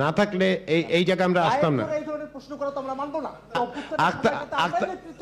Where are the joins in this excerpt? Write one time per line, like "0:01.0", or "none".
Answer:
0:03.5